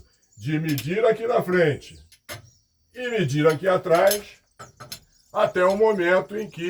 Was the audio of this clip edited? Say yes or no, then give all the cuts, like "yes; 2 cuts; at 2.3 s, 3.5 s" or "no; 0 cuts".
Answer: no; 0 cuts